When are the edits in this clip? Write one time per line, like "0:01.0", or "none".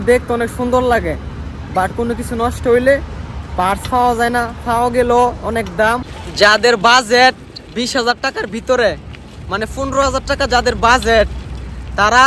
0:06.2